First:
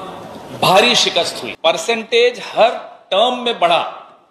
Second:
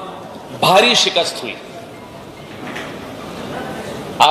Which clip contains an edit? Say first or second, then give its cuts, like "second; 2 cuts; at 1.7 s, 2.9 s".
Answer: first; 1 cut; at 1.4 s